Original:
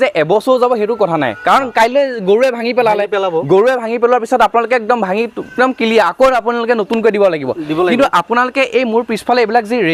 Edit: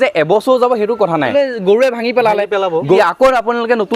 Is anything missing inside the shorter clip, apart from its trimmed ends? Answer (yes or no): yes